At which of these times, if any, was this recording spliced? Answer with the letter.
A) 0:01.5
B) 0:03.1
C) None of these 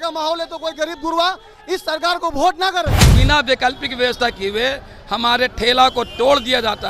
B